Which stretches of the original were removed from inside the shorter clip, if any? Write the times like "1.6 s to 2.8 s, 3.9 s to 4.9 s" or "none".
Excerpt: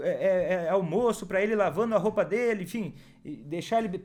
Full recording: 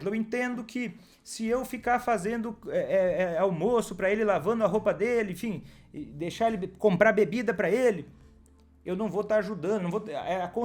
none

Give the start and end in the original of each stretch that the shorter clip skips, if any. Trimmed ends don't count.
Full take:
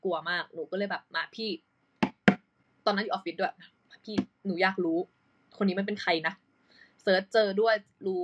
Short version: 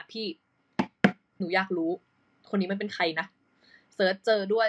2.5 s to 4.3 s

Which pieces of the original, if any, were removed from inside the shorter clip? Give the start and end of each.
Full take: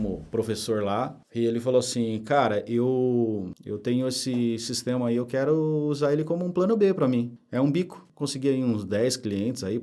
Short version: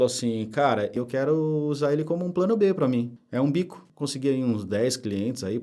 2.7 s to 5.2 s

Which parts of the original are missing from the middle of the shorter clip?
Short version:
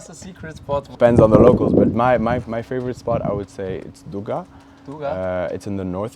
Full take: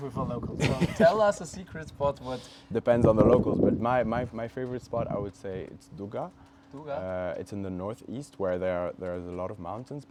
2.3 s to 2.8 s

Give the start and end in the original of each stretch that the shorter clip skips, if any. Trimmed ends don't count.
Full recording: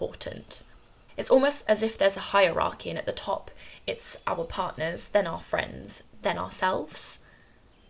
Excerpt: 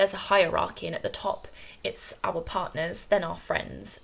none

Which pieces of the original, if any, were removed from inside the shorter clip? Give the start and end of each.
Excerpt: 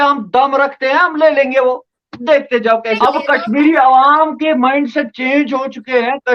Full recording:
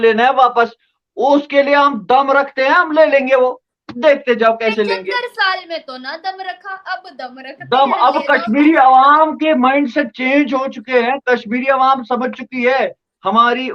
4.7 s to 8.0 s

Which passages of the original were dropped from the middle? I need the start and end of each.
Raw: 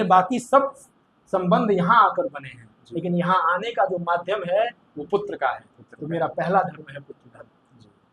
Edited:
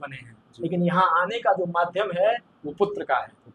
none

